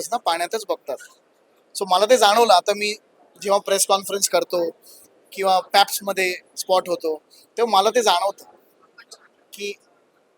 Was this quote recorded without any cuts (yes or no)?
yes